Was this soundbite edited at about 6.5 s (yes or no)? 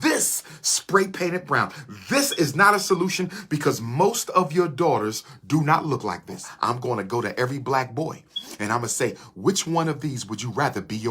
yes